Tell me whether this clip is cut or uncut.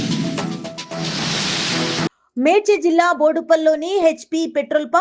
cut